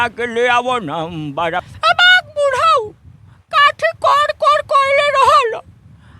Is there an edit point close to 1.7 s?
yes; 1 cut; at 1.7 s

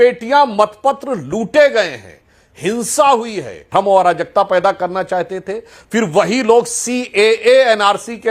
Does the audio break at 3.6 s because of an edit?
yes; 1 cut; at 3.6 s

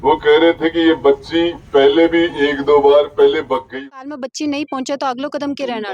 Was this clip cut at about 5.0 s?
no; 1 cut; at 3.8 s

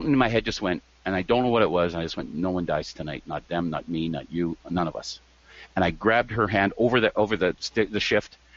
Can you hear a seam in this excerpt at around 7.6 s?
yes; 1 cut; at 7.6 s

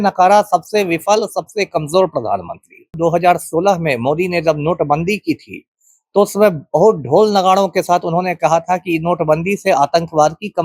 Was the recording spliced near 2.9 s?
yes; 1 cut; at 2.9 s

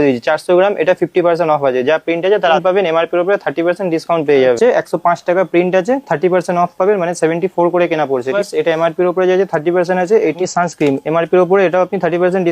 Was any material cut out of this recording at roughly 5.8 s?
no; 4 cuts; at 2.6 s, 4.6 s, 8.3 s, 10.4 s

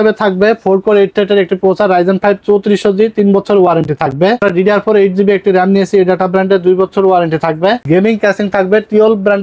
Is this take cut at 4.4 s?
yes; 2 cuts; at 4.4 s, 7.8 s

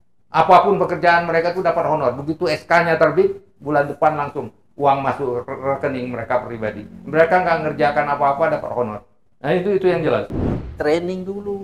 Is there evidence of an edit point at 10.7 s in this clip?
yes; 1 cut; at 10.7 s

